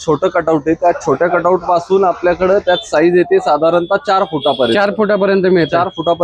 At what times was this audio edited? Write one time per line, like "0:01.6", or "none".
none